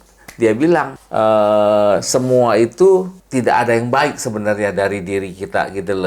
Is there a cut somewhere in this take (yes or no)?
yes